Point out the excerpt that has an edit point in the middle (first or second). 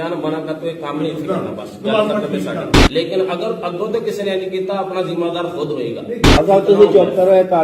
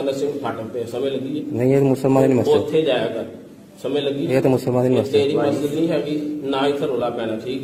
first